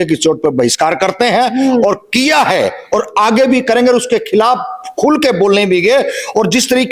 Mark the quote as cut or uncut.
uncut